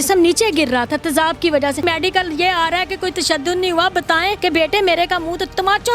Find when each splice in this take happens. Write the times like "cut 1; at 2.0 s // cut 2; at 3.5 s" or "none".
cut 1; at 1.8 s // cut 2; at 4.4 s